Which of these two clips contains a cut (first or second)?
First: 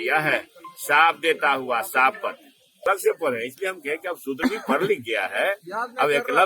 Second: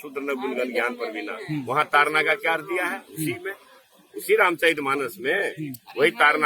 first